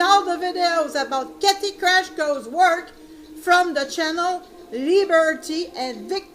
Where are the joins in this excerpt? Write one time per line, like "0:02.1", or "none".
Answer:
0:01.5